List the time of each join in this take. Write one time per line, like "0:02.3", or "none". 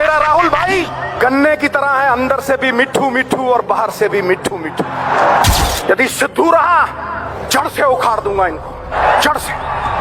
0:01.0
0:05.6
0:07.3
0:09.0